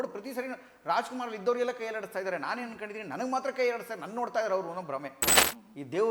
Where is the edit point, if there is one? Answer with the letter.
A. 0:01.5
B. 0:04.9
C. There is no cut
C